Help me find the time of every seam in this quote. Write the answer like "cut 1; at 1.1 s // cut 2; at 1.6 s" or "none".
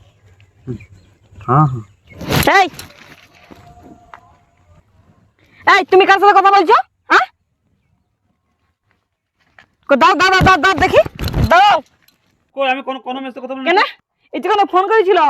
cut 1; at 12.4 s